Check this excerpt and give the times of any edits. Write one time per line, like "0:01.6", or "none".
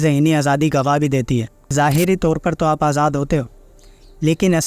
0:01.6